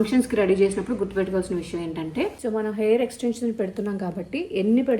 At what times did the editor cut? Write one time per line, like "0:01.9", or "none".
0:02.4